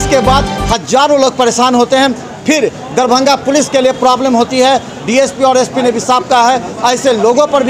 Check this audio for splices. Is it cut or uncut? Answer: uncut